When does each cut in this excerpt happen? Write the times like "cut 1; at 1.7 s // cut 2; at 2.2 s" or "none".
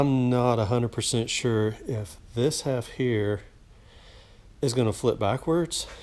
none